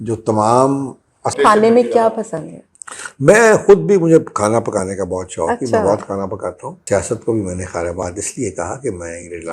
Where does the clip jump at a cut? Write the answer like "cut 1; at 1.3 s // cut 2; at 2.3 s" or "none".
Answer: cut 1; at 1.3 s // cut 2; at 6.8 s